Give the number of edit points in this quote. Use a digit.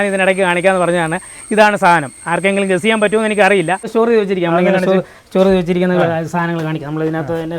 1